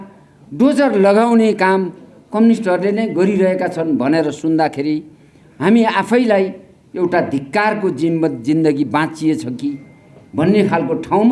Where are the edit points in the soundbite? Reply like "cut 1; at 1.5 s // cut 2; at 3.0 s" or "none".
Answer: none